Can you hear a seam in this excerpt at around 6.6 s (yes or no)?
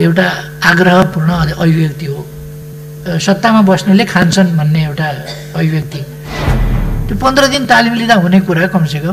yes